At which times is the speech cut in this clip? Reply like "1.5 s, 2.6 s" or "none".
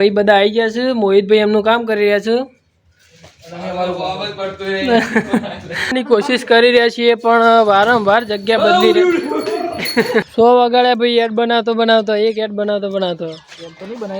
5.9 s, 10.3 s